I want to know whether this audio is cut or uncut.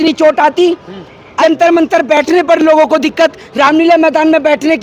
cut